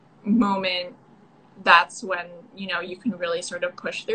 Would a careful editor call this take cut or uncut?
uncut